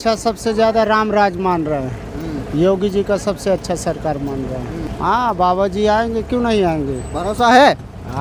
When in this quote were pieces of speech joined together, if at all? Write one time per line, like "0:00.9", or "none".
0:04.9

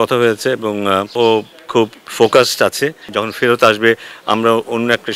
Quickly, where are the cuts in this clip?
0:01.1
0:03.2

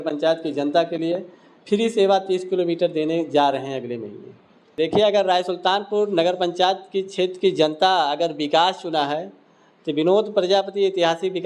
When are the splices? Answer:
0:04.6

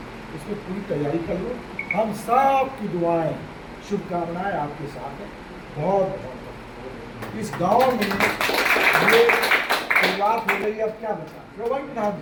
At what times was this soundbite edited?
none

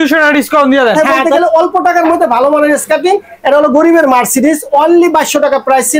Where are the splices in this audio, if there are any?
0:00.9

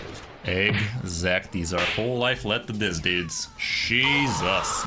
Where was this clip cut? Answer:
none

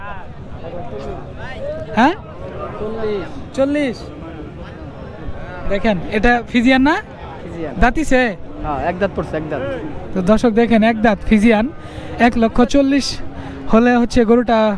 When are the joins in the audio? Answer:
none

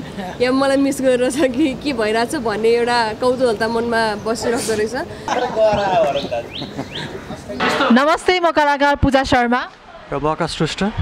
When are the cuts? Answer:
0:05.3
0:07.6

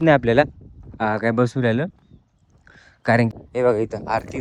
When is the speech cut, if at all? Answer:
0:03.3

